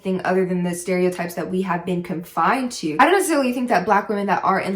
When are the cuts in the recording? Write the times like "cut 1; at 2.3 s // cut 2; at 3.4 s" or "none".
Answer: cut 1; at 2.9 s